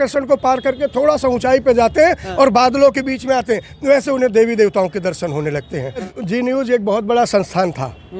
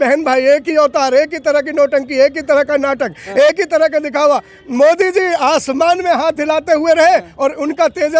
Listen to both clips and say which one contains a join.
first; 1 cut; at 6.1 s

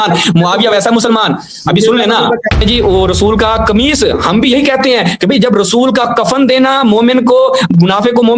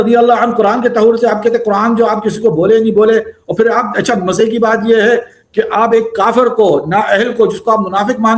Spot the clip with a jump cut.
first; 1 cut; at 2.6 s

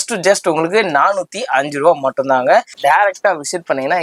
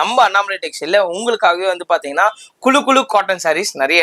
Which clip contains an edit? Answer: first; 1 cut; at 2.7 s

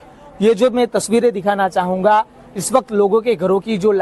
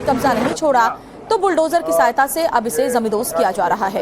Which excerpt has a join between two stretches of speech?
second; 1 cut; at 2.1 s

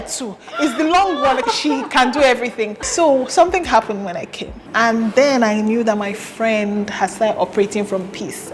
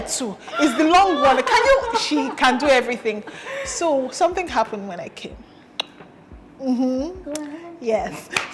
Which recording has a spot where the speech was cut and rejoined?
first; 3 cuts; at 1.4 s, 2.8 s, 4.6 s

